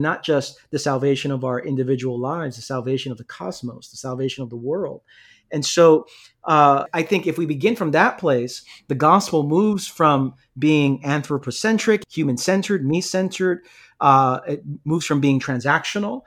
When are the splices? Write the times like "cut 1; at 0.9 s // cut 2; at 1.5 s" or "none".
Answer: cut 1; at 6.9 s // cut 2; at 12.0 s